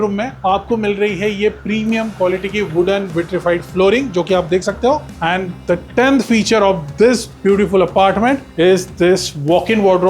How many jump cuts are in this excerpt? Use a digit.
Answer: 2